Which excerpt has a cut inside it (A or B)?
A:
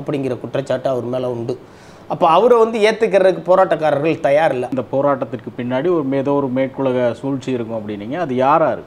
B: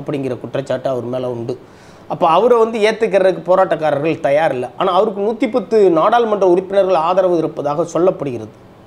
A